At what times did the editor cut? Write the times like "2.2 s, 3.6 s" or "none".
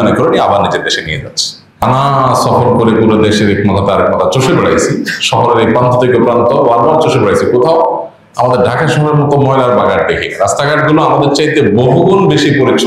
1.8 s